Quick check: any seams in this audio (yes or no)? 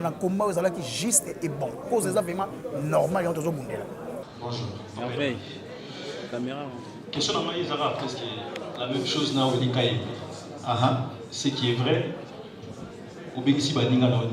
yes